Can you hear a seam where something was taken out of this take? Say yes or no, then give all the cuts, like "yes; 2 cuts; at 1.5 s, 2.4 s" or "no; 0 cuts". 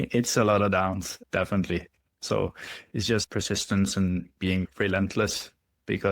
yes; 1 cut; at 4.7 s